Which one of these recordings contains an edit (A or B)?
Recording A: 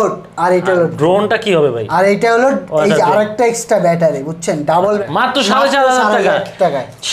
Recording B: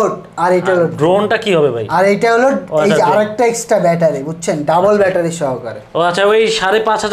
A